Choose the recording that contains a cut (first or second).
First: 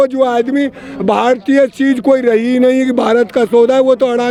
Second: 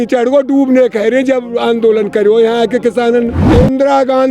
second